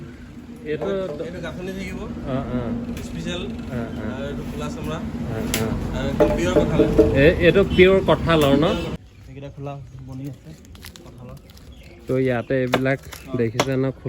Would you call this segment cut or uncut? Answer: cut